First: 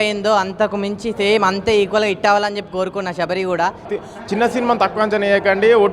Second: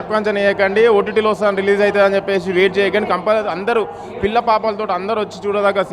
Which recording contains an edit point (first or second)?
first